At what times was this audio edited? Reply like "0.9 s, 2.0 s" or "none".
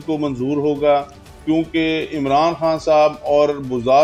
none